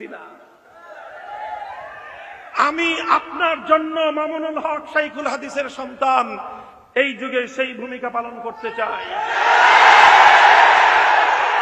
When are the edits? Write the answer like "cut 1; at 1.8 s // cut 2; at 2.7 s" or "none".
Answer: none